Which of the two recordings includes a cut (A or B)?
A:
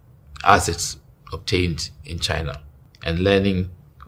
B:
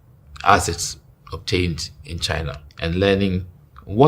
B